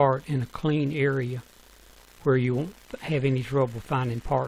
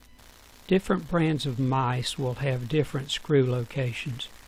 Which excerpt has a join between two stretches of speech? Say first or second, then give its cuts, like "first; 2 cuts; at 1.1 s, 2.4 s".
first; 1 cut; at 3.2 s